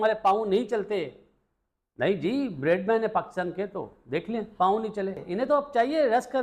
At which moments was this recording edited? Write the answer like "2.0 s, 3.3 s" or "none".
5.2 s